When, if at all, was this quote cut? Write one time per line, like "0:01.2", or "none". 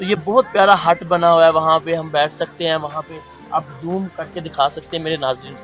none